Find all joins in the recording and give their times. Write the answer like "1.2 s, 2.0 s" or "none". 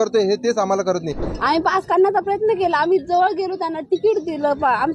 1.2 s